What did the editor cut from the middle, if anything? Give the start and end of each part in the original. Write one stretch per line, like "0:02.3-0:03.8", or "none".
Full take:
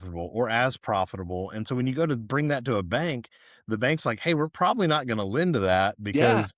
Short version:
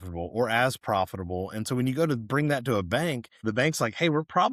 0:03.3-0:03.5